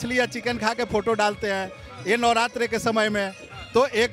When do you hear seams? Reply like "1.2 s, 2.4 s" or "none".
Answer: none